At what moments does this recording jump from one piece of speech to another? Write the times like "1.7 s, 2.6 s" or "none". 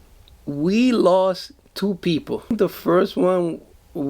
2.5 s